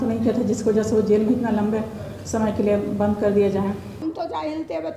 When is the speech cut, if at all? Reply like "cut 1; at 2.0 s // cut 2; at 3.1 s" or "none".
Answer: cut 1; at 4.0 s